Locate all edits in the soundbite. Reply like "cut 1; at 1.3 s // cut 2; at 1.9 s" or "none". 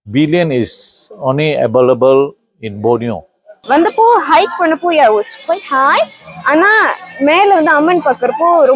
cut 1; at 3.5 s